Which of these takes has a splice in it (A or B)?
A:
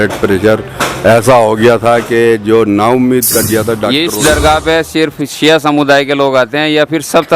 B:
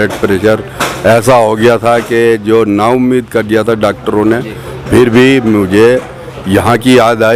A